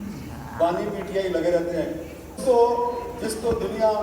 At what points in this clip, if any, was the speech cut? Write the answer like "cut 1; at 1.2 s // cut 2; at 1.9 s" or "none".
cut 1; at 2.4 s